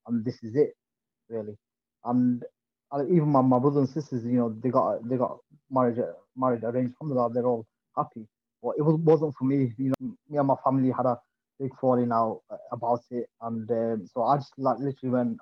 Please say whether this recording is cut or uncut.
cut